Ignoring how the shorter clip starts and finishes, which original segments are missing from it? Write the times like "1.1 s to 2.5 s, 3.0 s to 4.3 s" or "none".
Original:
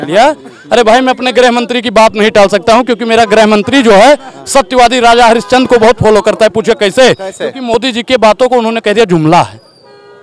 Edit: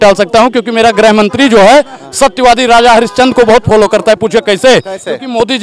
none